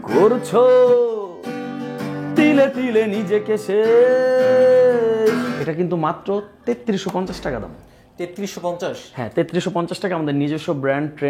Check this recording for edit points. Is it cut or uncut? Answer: cut